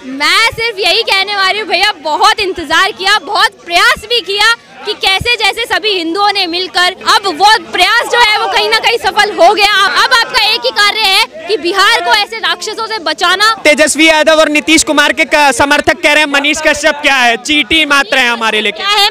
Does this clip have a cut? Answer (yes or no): yes